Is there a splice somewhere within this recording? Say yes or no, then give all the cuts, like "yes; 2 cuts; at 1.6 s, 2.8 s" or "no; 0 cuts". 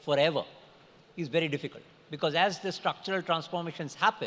no; 0 cuts